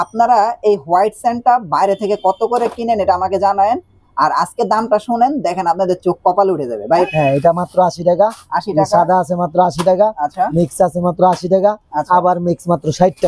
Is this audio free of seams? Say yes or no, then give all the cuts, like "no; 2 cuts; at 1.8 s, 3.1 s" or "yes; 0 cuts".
no; 1 cut; at 7.1 s